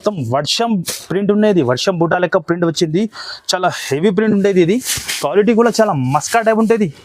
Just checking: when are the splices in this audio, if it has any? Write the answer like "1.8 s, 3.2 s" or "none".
none